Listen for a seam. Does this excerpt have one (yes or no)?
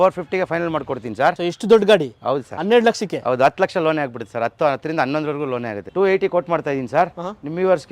yes